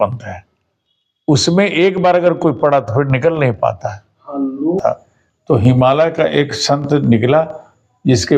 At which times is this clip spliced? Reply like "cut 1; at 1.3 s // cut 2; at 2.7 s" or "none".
cut 1; at 4.8 s